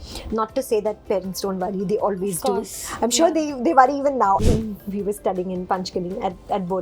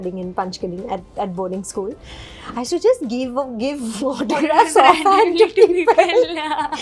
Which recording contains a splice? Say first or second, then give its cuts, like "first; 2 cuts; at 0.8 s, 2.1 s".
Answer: first; 1 cut; at 4.4 s